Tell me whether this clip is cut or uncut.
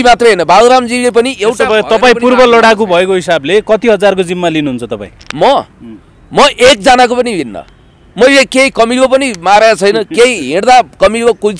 uncut